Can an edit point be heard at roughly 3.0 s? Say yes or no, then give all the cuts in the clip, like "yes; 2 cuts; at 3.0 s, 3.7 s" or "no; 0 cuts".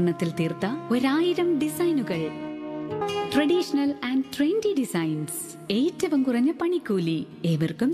yes; 1 cut; at 3.0 s